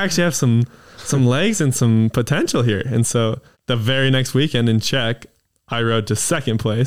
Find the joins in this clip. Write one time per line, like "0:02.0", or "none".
0:03.5